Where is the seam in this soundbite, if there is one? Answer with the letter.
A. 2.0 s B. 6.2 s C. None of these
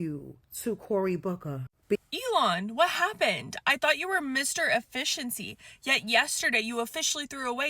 A